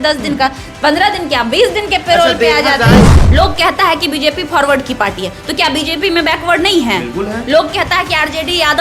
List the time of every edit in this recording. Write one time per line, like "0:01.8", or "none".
0:03.0